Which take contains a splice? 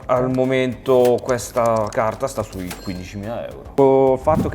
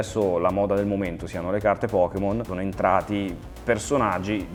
first; 1 cut; at 3.6 s

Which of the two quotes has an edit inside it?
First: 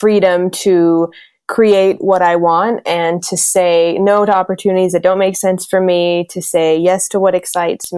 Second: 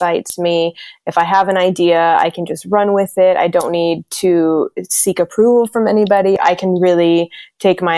second; 1 cut; at 6.3 s

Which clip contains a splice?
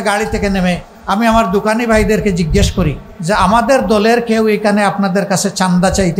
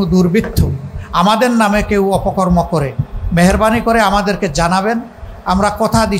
first; 2 cuts; at 0.9 s, 3.1 s

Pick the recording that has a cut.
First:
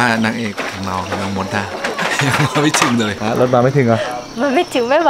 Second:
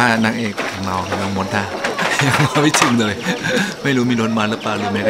first; 1 cut; at 3.1 s

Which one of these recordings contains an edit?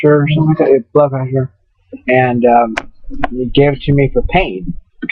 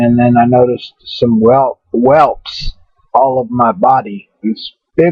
second; 1 cut; at 2.7 s

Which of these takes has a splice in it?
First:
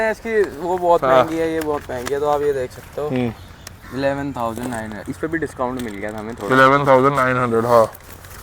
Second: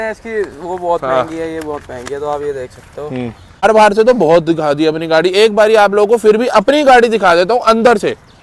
second; 1 cut; at 3.6 s

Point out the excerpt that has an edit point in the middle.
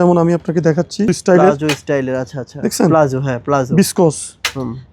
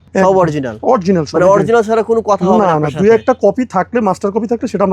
first; 1 cut; at 1.1 s

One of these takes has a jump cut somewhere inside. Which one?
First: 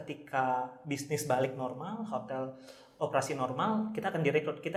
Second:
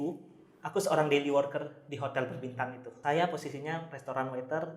second; 1 cut; at 2.9 s

